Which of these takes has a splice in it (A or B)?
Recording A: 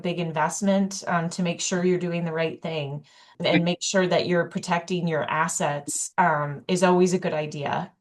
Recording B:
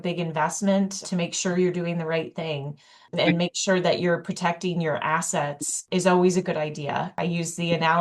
B